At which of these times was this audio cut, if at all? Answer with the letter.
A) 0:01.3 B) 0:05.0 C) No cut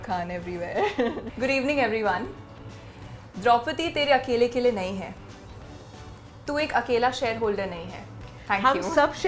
A